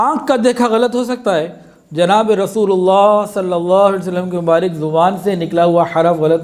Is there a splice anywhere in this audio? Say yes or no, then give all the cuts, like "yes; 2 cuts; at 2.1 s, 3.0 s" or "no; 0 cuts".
no; 0 cuts